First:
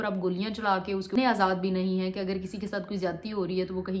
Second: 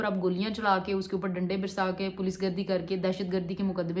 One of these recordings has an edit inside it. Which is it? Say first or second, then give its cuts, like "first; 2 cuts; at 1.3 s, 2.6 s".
first; 1 cut; at 1.2 s